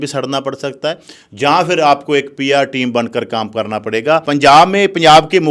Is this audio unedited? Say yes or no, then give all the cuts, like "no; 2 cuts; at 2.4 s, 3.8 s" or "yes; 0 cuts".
no; 1 cut; at 4.2 s